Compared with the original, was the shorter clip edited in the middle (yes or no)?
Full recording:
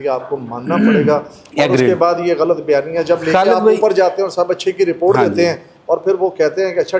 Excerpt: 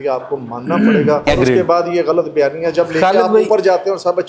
yes